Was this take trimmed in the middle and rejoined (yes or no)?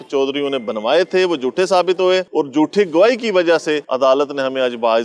no